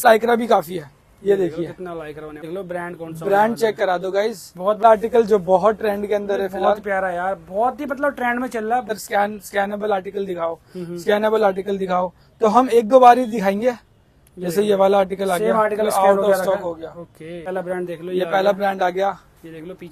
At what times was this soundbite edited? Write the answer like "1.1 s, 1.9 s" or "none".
2.4 s, 4.8 s, 8.9 s, 17.4 s